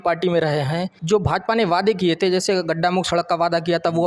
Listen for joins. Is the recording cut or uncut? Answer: cut